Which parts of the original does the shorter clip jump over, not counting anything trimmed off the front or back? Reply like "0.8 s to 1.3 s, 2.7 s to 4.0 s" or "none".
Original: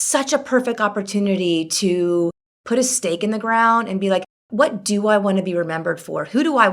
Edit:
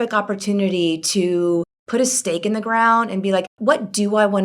2.4 s to 2.5 s, 4.3 s to 4.4 s